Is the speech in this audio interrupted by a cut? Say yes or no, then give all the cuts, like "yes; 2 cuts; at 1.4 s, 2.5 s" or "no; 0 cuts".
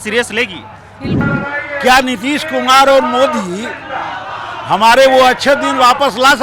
yes; 1 cut; at 1.2 s